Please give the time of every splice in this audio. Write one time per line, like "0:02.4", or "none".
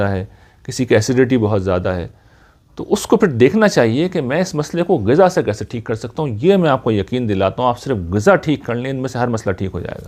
none